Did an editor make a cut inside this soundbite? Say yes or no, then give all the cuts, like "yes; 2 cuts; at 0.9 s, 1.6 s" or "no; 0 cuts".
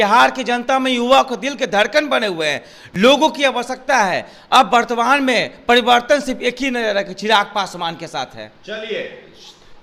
no; 0 cuts